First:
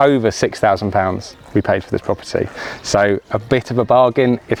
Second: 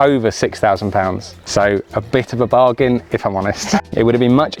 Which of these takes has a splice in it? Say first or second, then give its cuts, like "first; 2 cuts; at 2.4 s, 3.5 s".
second; 2 cuts; at 1.3 s, 3.8 s